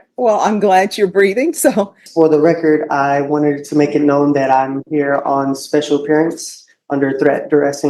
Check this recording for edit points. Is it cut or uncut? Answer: cut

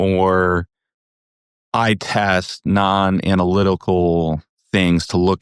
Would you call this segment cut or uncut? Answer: uncut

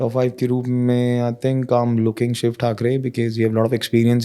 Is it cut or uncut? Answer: uncut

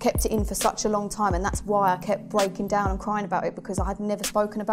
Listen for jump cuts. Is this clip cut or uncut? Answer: uncut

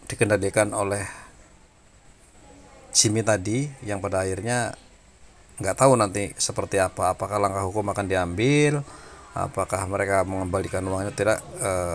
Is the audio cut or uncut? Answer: uncut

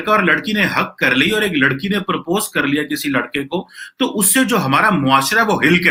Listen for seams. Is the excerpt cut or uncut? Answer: uncut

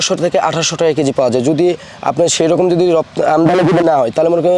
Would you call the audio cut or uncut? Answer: uncut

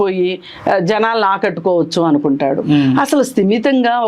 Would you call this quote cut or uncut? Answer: uncut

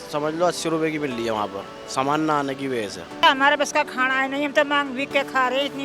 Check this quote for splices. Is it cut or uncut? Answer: cut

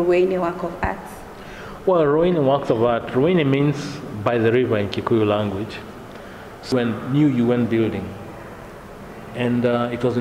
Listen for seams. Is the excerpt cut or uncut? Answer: cut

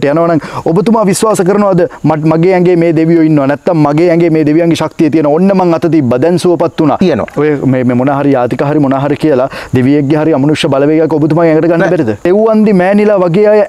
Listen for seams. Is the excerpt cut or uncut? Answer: cut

